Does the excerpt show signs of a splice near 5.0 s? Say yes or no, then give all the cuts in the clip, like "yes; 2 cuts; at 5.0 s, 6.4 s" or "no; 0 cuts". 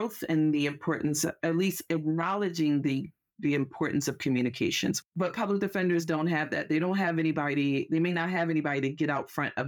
yes; 1 cut; at 5.0 s